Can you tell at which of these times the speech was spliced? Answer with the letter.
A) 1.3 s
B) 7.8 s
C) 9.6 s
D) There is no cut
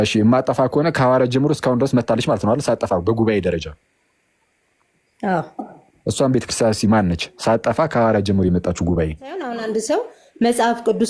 C